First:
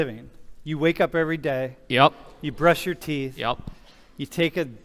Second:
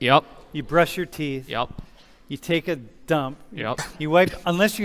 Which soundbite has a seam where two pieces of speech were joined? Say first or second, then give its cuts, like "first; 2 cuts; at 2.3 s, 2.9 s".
second; 1 cut; at 3.9 s